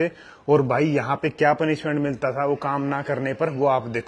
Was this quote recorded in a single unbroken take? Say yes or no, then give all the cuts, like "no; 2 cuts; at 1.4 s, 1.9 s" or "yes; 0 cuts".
yes; 0 cuts